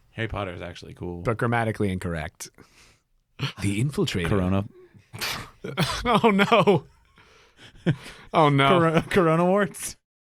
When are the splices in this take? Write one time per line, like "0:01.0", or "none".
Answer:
0:03.6